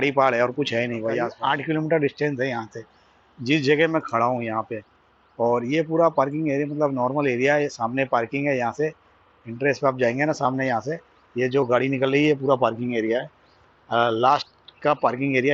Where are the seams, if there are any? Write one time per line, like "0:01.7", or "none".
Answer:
0:01.3